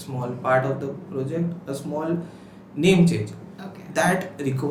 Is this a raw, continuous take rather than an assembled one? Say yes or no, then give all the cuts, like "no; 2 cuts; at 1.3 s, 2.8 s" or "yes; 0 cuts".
yes; 0 cuts